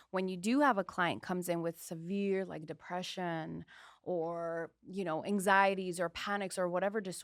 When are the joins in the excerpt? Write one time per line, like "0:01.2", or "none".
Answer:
none